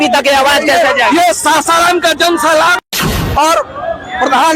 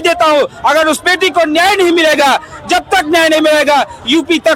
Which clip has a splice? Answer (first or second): first